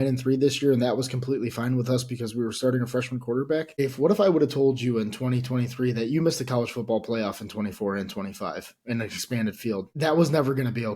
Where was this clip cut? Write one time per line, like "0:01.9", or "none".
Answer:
0:03.8
0:09.9